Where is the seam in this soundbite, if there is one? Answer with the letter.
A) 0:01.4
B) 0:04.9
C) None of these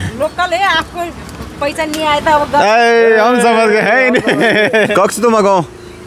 B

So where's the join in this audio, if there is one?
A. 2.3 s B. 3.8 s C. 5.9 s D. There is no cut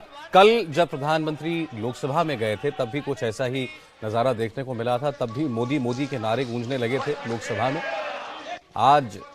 B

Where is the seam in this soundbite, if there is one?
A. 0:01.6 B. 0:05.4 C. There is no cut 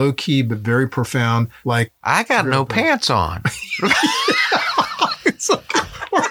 C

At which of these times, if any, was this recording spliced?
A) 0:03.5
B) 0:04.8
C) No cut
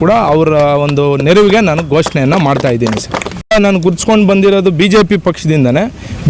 A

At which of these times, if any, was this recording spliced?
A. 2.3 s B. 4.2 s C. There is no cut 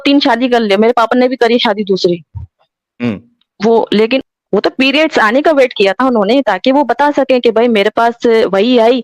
B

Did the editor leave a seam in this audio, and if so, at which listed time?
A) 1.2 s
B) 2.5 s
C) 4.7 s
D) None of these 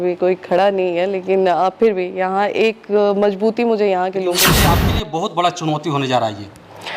C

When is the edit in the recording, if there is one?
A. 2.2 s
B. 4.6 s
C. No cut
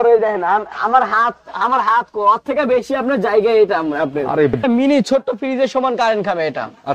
B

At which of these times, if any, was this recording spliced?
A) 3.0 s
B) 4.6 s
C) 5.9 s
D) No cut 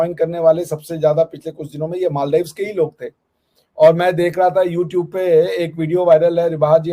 D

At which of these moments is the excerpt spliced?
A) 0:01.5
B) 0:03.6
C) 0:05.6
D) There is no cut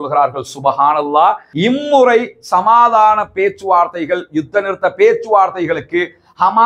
A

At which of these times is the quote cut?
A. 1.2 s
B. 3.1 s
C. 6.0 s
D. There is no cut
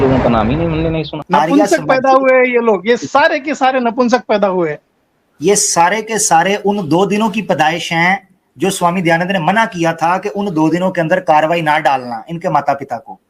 A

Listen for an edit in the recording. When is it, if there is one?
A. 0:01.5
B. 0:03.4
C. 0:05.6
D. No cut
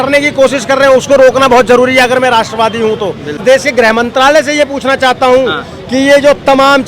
B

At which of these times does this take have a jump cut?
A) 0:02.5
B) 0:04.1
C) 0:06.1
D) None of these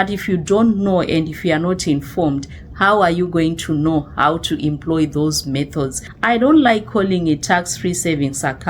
C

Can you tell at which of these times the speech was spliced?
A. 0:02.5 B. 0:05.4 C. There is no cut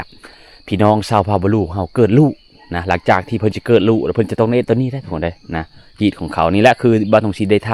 C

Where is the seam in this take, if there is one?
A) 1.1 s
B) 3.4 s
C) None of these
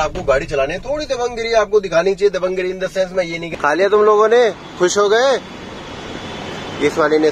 B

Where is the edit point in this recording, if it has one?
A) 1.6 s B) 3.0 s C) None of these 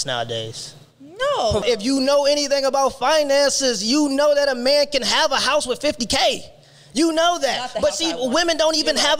A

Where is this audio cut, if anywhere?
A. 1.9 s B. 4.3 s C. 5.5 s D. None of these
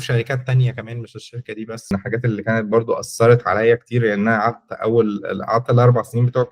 A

